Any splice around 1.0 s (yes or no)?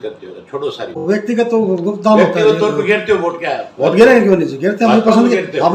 yes